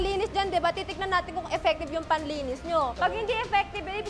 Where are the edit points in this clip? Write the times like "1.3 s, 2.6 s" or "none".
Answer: 3.2 s